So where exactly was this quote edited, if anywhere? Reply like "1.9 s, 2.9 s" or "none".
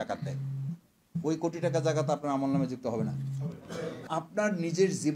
4.1 s

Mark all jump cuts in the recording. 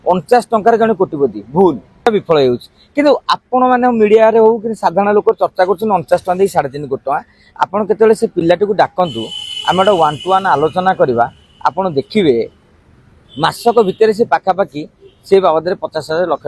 2.1 s

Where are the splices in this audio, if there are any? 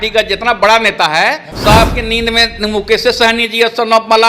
1.5 s

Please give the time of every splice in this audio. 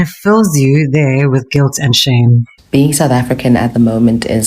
2.5 s

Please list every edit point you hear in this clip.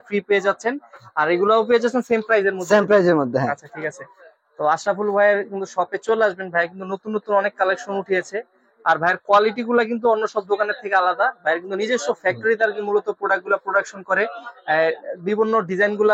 none

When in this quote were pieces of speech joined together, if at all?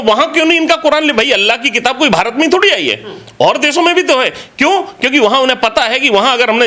none

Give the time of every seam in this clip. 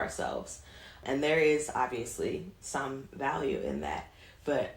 1.0 s

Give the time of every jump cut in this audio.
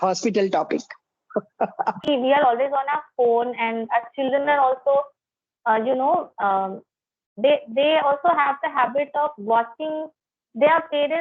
2.0 s

